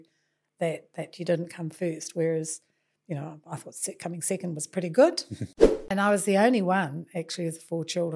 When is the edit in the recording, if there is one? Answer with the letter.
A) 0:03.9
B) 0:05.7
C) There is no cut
B